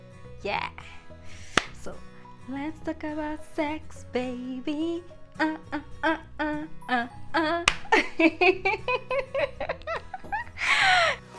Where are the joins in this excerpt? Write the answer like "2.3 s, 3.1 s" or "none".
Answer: none